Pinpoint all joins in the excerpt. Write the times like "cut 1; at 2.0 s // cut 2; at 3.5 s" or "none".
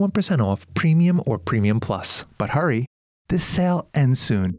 cut 1; at 2.2 s

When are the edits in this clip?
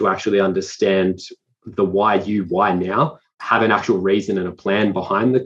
cut 1; at 3.4 s

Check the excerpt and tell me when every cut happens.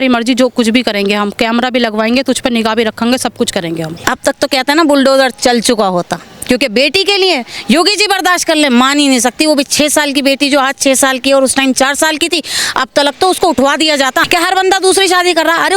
cut 1; at 3.9 s // cut 2; at 14.2 s

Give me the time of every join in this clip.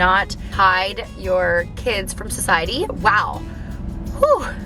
cut 1; at 3.0 s

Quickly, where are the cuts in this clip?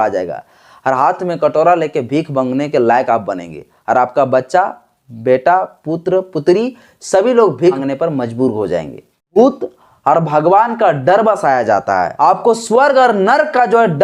cut 1; at 7.8 s // cut 2; at 9.4 s // cut 3; at 12.1 s

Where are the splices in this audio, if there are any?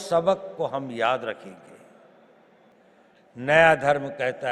cut 1; at 2.7 s

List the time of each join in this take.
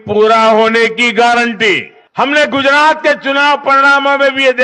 cut 1; at 2.0 s

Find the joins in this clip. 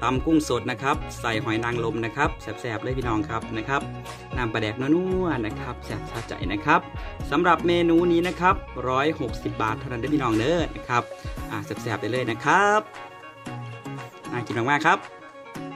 cut 1; at 12.8 s // cut 2; at 14.3 s // cut 3; at 15.0 s

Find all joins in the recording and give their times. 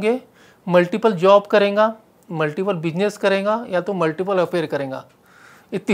none

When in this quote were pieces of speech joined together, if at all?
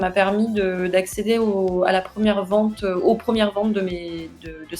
none

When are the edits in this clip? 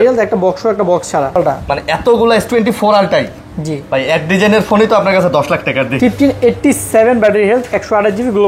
cut 1; at 1.4 s // cut 2; at 6.0 s

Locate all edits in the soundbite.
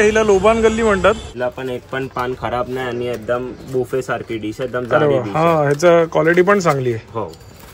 cut 1; at 1.3 s

